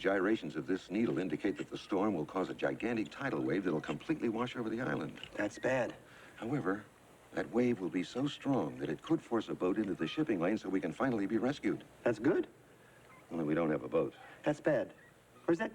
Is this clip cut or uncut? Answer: uncut